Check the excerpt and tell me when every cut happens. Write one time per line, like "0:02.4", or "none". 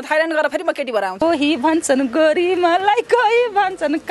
0:01.2